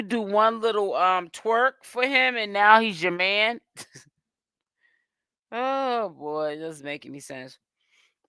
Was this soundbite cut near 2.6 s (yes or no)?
no